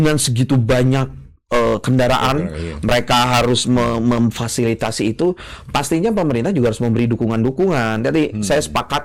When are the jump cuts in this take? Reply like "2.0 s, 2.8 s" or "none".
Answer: none